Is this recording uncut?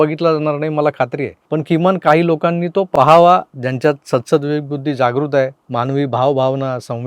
no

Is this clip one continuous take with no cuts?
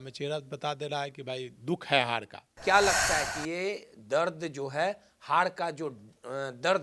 no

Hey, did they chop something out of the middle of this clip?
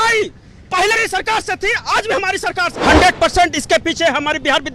yes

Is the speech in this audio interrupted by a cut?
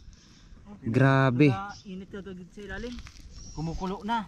no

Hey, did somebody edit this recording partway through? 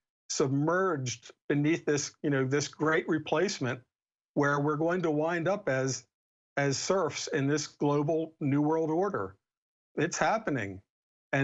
no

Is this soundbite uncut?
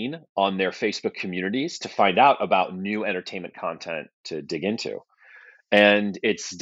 yes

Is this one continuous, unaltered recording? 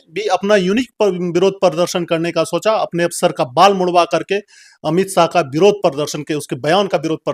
yes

